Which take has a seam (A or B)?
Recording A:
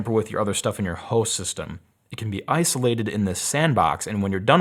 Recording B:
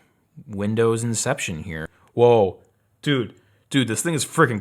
B